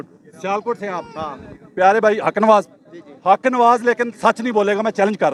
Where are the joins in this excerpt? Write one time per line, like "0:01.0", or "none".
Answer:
none

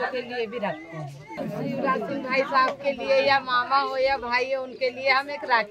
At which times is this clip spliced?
0:01.4

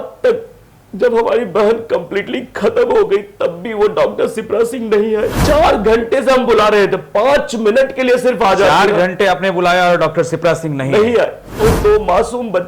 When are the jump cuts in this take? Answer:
0:05.4
0:11.6

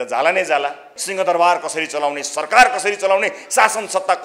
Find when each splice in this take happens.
0:01.0

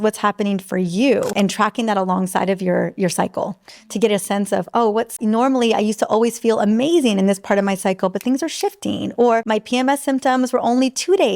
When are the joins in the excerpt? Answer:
0:01.3
0:05.2
0:09.4

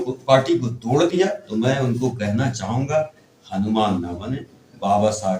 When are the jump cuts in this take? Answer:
0:01.5

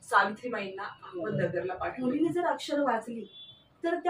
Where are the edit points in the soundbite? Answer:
0:01.9

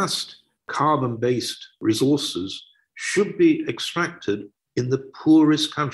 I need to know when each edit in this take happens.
0:04.6

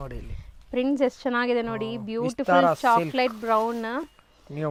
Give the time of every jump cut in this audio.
none

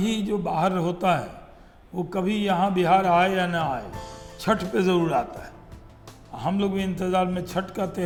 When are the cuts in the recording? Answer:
none

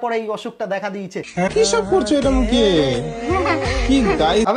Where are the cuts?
0:01.5

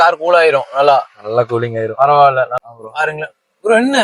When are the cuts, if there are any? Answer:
0:02.5

